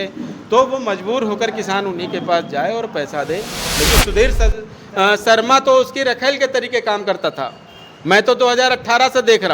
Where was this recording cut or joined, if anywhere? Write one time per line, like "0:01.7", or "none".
0:03.9